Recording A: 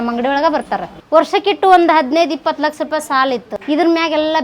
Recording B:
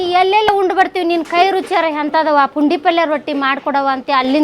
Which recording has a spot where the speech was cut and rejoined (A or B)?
A